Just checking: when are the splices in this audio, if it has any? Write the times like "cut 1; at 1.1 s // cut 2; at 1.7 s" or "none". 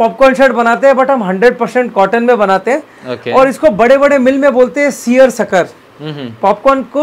none